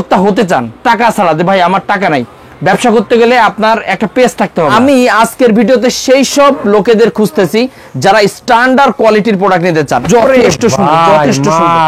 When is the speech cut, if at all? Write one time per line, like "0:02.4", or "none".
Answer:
0:05.1
0:10.0

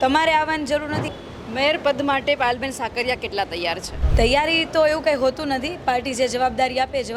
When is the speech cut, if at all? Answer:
0:01.0
0:04.0

